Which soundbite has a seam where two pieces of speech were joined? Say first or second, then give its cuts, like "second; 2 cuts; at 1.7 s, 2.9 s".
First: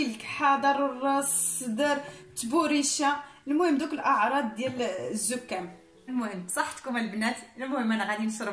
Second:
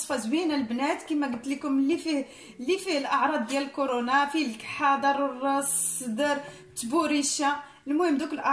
first; 1 cut; at 6.1 s